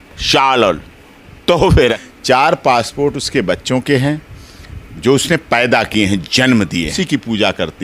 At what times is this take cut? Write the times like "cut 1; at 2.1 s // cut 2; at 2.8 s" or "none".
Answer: cut 1; at 2.0 s // cut 2; at 6.9 s